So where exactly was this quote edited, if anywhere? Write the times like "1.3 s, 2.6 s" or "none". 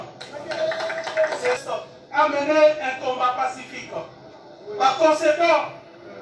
1.6 s